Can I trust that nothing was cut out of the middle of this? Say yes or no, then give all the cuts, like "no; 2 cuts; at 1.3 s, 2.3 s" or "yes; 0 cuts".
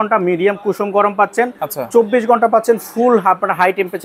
yes; 0 cuts